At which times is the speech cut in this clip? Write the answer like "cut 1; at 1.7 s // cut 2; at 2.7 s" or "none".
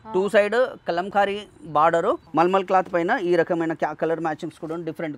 cut 1; at 2.2 s